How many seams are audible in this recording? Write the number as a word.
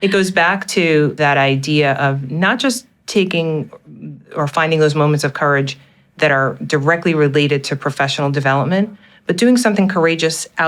one